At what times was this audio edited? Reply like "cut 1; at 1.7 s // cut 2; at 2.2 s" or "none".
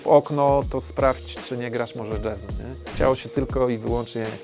cut 1; at 2.8 s